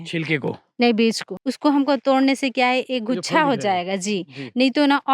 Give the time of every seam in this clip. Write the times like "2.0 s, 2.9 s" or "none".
1.3 s